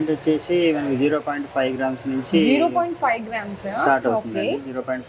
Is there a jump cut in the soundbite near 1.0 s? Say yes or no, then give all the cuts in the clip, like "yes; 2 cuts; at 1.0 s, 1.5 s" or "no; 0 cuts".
no; 0 cuts